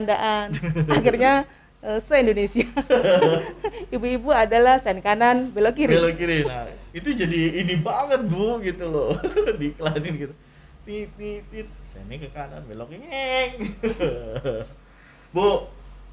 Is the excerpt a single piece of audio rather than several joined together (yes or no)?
yes